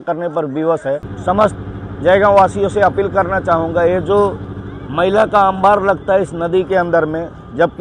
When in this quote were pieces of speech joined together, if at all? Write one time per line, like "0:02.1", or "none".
0:01.1